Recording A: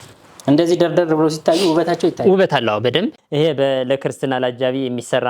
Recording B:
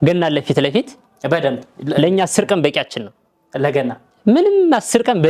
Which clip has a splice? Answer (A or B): A